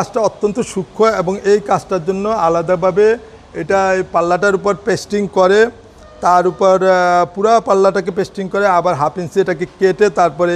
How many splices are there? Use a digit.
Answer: 0